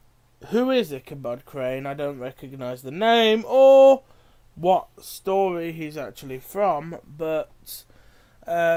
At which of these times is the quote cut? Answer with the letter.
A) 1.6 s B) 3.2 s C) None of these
C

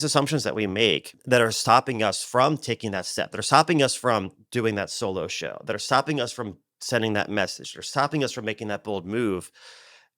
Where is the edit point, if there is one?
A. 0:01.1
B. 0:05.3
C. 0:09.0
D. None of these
A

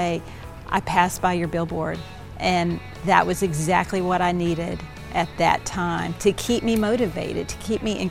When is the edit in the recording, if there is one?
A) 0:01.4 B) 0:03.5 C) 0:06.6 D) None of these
D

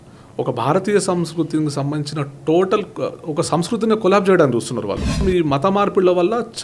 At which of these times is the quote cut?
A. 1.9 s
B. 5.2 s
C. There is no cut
B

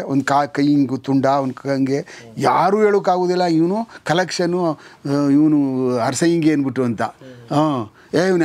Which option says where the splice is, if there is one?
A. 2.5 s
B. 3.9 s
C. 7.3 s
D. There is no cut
D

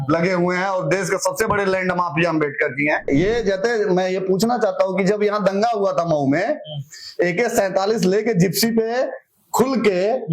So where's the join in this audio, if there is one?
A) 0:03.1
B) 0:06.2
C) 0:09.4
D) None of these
A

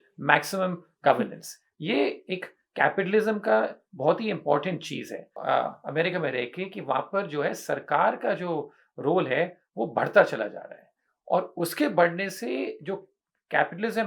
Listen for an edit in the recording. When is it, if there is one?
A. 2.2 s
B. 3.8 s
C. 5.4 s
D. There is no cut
C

